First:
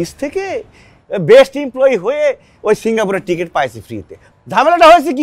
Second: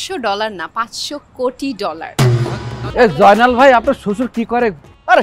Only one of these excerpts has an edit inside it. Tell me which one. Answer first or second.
second